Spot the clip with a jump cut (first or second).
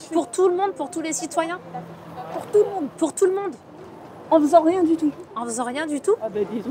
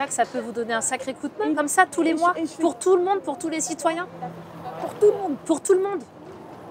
second